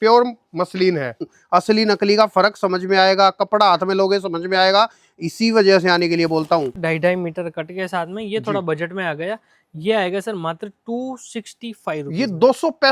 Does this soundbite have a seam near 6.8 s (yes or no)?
yes